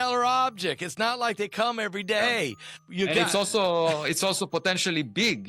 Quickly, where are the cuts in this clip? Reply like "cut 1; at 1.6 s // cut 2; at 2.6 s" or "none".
cut 1; at 2.8 s